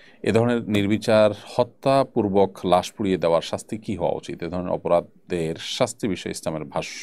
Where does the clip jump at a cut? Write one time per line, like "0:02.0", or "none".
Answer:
none